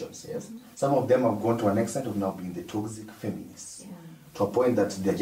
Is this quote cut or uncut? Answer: uncut